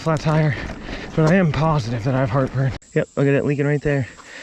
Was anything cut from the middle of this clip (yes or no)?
yes